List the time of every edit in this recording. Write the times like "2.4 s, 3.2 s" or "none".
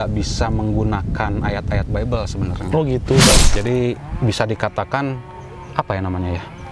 3.5 s